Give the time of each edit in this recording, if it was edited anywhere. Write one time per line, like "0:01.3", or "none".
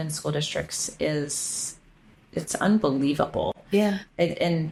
none